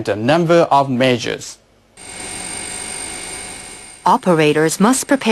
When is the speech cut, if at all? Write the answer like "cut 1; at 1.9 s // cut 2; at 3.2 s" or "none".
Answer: cut 1; at 1.9 s